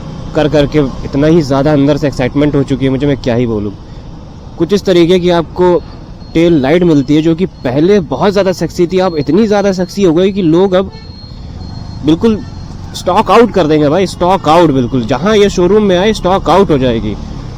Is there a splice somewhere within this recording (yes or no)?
no